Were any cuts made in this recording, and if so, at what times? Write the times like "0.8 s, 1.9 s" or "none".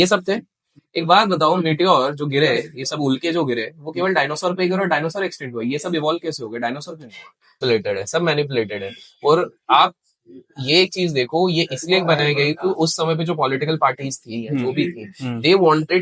7.6 s